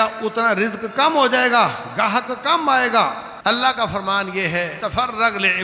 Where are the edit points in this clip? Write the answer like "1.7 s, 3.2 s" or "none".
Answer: 3.3 s, 4.7 s